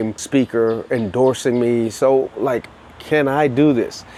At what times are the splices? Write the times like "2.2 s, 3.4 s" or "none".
none